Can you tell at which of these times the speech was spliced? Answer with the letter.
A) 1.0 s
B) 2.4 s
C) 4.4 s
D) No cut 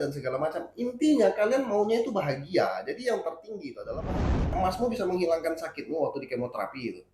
C